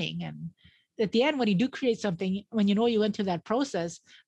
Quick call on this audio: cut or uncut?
cut